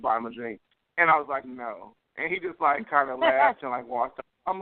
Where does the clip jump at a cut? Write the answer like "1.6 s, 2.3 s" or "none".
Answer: none